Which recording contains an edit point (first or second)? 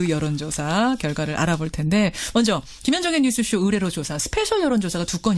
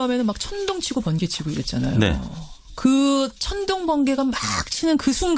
first